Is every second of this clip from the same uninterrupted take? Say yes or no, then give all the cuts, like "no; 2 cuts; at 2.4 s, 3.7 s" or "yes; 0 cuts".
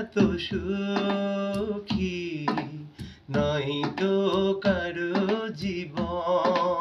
yes; 0 cuts